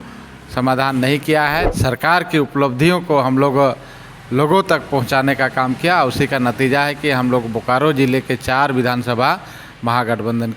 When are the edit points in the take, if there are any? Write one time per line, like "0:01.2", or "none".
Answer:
0:01.6